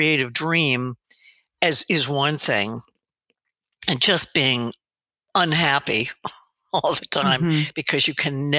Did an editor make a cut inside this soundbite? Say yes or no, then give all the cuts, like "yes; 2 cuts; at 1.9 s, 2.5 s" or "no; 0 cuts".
no; 0 cuts